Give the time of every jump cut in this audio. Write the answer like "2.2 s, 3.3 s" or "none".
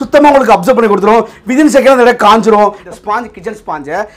2.8 s